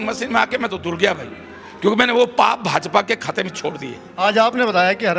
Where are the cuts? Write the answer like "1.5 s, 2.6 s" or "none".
none